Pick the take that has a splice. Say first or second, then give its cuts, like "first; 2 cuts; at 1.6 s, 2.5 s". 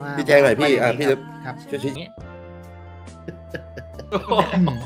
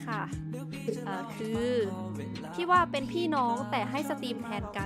first; 1 cut; at 2.0 s